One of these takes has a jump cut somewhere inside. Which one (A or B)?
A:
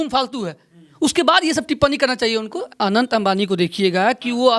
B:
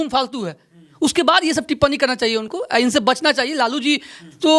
A